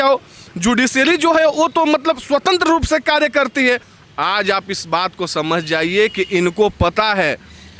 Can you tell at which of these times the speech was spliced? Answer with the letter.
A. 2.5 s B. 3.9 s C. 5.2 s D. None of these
B